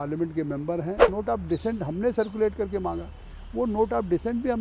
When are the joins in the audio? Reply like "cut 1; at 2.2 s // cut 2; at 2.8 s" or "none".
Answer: cut 1; at 1.1 s